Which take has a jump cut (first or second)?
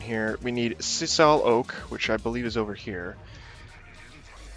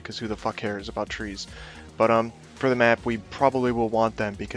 second